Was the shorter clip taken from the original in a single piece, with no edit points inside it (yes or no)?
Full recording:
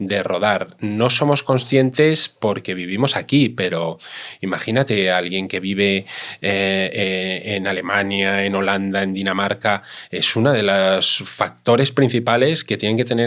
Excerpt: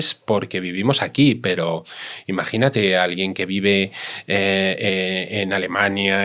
yes